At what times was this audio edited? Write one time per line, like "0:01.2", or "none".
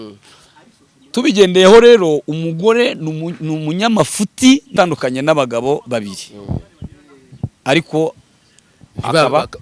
0:04.7